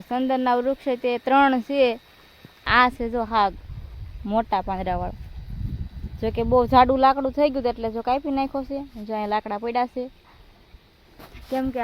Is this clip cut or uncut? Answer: cut